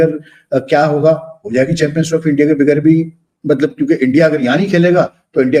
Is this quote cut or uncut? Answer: uncut